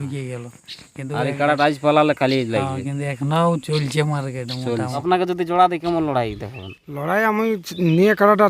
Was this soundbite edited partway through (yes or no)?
yes